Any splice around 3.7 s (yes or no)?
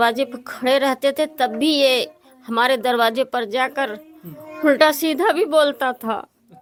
no